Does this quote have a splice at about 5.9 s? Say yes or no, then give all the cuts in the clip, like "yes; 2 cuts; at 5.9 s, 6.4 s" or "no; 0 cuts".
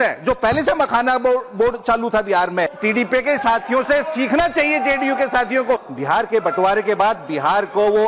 yes; 2 cuts; at 2.7 s, 5.9 s